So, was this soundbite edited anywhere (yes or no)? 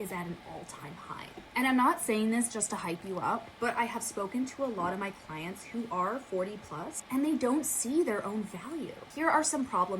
yes